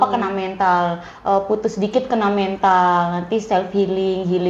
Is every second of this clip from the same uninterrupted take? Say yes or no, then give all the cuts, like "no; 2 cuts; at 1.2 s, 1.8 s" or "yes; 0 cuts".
yes; 0 cuts